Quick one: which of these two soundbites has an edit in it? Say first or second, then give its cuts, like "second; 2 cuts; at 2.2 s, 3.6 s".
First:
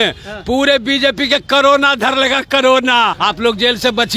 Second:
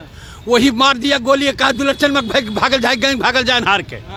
first; 1 cut; at 3.2 s